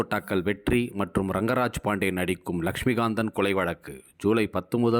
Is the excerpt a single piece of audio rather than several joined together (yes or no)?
yes